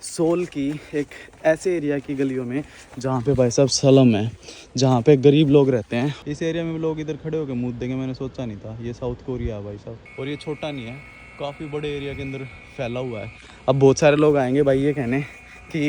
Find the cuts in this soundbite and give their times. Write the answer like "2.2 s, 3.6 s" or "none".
6.2 s, 10.0 s